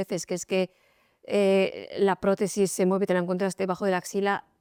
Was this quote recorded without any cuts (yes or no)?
yes